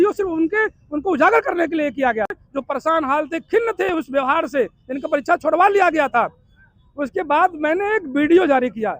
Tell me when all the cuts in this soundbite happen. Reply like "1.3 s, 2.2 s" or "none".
2.5 s